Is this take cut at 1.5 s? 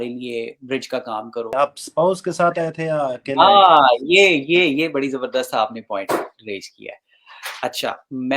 yes; 1 cut; at 1.5 s

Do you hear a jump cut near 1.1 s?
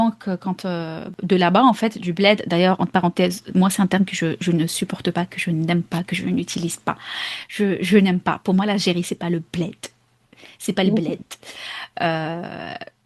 yes; 1 cut; at 1.1 s

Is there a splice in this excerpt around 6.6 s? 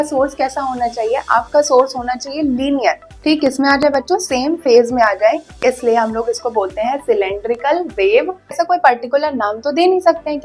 no; 2 cuts; at 3.1 s, 8.6 s

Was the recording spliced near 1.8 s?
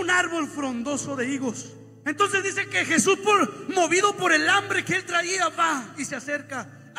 no; 0 cuts

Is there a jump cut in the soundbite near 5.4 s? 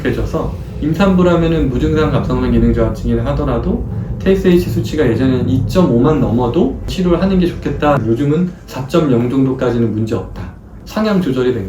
no; 2 cuts; at 6.9 s, 10.8 s

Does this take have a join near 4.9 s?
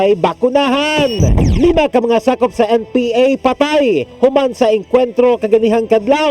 no; 1 cut; at 1.4 s

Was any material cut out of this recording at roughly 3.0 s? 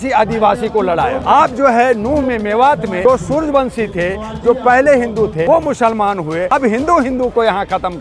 yes; 4 cuts; at 1.2 s, 3.0 s, 5.5 s, 6.5 s

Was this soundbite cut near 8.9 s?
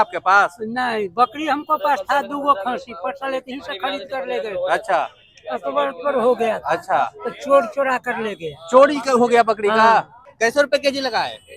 no; 1 cut; at 10.2 s

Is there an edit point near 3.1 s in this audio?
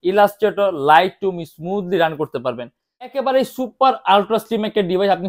yes; 1 cut; at 3.1 s

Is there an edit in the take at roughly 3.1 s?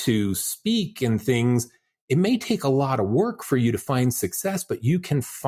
no; 0 cuts

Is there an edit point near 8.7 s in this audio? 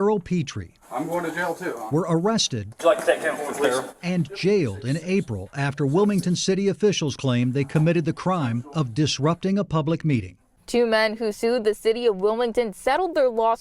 no; 1 cut; at 10.6 s

